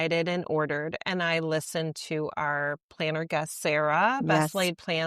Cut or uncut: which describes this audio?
uncut